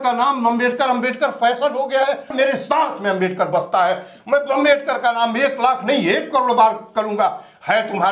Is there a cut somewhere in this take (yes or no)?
yes